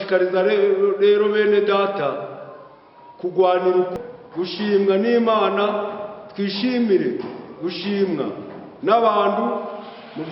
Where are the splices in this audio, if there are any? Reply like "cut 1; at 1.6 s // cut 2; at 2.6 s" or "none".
cut 1; at 3.9 s